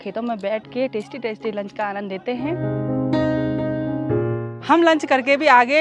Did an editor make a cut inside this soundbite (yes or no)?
no